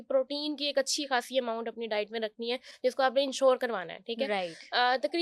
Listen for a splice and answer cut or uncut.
uncut